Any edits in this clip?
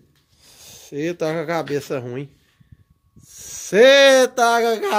no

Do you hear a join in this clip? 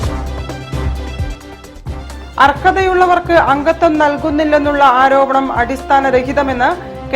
yes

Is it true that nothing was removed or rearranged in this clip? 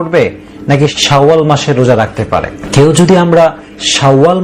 no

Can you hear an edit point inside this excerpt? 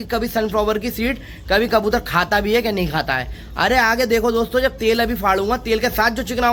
no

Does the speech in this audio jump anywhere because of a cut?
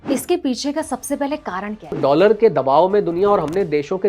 yes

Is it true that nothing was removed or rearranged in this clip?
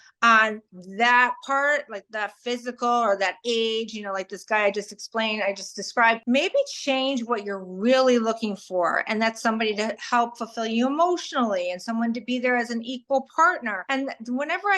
no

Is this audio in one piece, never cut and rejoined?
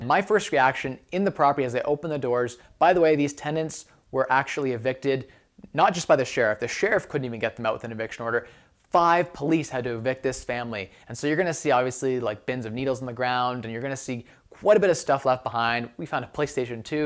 yes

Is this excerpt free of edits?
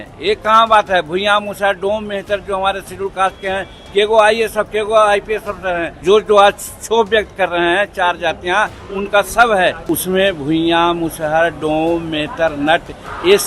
no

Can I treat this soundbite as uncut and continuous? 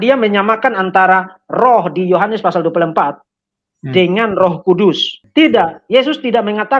no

